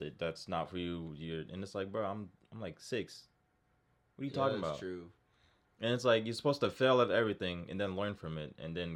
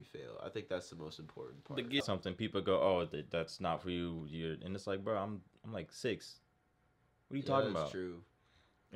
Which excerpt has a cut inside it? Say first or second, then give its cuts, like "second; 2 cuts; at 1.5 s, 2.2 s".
second; 1 cut; at 2.0 s